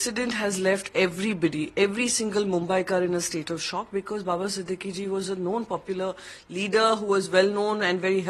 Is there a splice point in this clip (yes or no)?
no